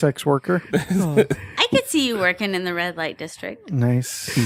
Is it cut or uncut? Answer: uncut